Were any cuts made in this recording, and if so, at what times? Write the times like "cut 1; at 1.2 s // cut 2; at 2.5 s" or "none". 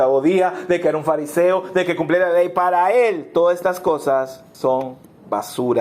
cut 1; at 4.4 s

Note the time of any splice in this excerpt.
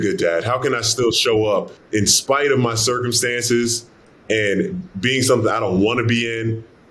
cut 1; at 1.8 s

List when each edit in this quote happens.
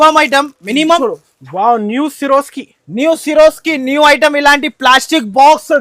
cut 1; at 1.0 s

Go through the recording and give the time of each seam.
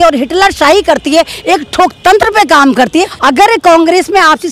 cut 1; at 3.1 s

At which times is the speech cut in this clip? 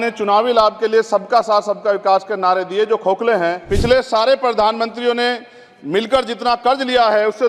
cut 1; at 3.6 s

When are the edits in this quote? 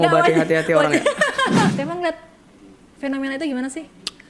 cut 1; at 1.7 s

